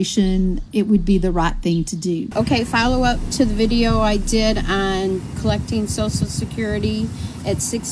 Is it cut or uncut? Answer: cut